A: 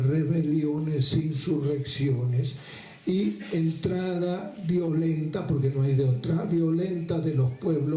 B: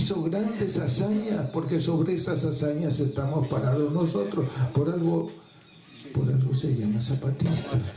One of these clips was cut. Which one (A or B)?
A